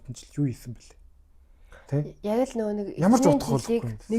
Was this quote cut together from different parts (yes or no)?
no